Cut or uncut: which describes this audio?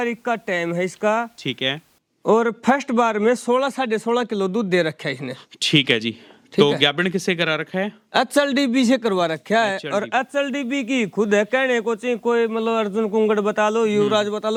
uncut